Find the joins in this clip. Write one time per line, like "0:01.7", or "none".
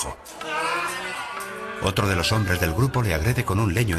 0:01.6